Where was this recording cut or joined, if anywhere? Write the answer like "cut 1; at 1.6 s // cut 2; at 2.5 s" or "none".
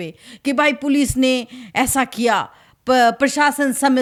none